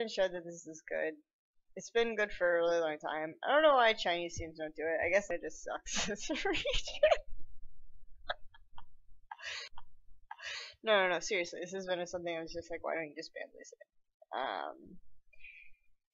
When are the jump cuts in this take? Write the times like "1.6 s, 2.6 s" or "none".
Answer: 13.3 s